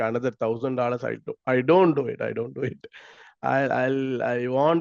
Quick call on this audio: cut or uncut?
uncut